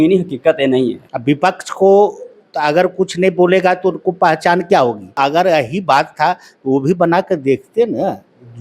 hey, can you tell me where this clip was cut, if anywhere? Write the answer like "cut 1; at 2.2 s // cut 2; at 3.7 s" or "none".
cut 1; at 1.1 s // cut 2; at 5.2 s